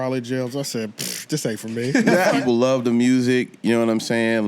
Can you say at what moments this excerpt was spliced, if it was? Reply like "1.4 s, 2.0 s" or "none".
2.4 s